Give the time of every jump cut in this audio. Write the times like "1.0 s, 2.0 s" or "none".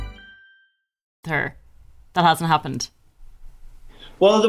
none